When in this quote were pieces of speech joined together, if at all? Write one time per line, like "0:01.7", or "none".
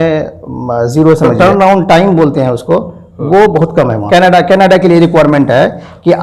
0:01.3
0:04.1